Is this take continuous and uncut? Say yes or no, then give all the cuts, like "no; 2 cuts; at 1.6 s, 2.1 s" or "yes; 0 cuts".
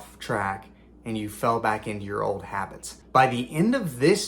no; 1 cut; at 2.9 s